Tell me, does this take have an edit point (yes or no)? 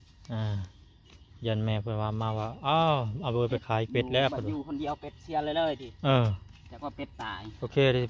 no